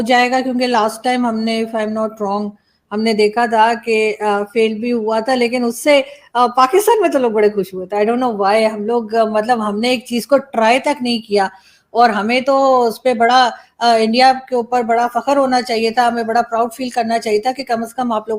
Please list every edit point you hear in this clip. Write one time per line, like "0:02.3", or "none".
none